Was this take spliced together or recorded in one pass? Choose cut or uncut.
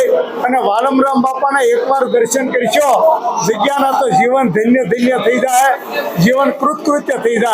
uncut